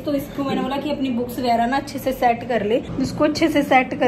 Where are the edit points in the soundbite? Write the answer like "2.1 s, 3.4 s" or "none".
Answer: 2.9 s